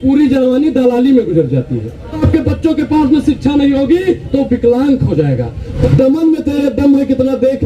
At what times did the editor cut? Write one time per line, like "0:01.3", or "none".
0:02.2
0:05.9